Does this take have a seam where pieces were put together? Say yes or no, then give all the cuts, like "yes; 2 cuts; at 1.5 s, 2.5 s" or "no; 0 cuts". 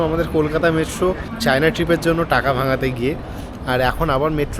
yes; 1 cut; at 1.3 s